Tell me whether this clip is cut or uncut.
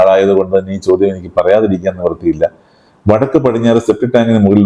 uncut